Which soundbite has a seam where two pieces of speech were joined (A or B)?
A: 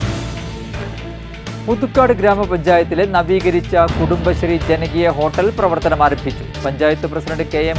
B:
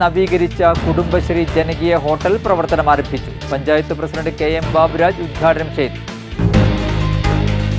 A